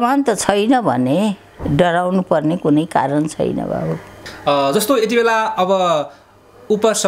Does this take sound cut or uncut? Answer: uncut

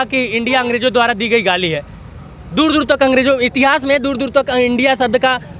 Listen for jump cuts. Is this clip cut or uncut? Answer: uncut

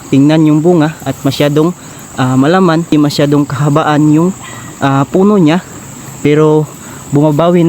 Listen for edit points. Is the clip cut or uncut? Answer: cut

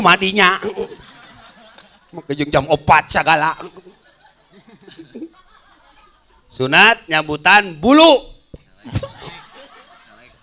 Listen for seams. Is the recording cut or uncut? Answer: cut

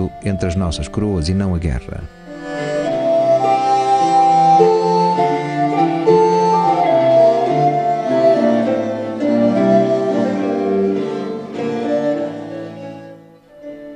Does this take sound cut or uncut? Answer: cut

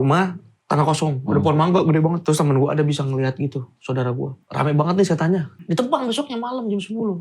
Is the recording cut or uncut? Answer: cut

